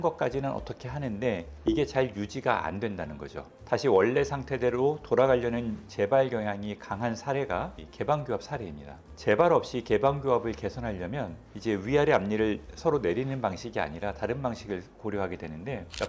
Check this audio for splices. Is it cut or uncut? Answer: uncut